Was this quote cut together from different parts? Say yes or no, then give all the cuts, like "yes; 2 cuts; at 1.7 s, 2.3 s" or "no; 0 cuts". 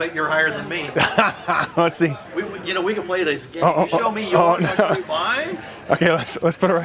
no; 0 cuts